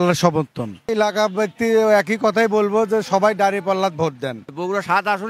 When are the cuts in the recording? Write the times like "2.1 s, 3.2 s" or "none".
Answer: 0.9 s, 4.5 s